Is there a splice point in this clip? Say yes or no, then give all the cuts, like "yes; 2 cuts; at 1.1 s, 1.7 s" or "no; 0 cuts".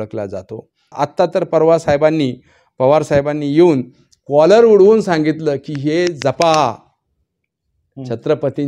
yes; 1 cut; at 0.9 s